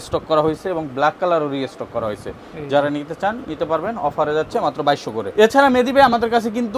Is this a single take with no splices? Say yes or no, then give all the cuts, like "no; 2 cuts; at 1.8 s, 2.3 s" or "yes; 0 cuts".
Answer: yes; 0 cuts